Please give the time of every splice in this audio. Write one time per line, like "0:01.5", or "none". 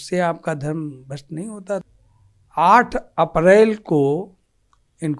0:01.9